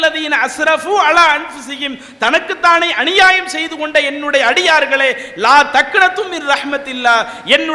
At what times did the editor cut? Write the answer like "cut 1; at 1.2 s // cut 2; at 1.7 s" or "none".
none